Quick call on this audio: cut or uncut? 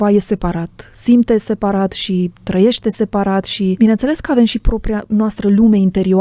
cut